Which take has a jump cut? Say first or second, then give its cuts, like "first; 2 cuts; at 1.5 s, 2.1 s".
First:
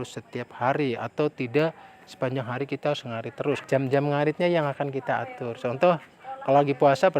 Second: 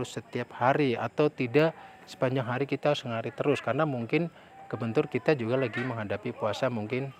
first; 1 cut; at 3.6 s